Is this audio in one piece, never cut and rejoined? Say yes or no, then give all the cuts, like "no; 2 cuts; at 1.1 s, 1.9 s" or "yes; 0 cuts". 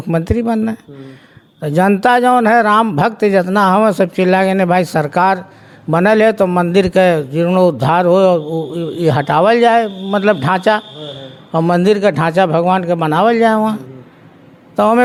yes; 0 cuts